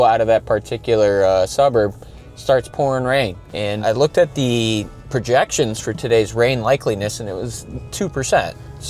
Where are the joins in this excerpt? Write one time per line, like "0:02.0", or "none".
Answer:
0:03.4